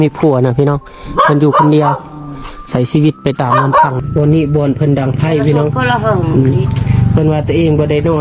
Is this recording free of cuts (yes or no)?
no